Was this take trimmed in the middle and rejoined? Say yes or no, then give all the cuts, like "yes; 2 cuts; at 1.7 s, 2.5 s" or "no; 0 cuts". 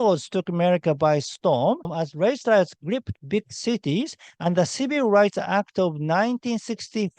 yes; 1 cut; at 1.9 s